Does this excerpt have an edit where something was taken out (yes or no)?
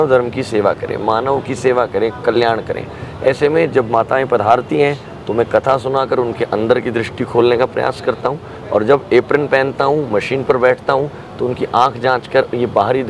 no